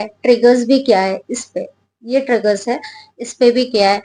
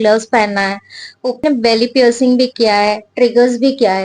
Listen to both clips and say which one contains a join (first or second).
second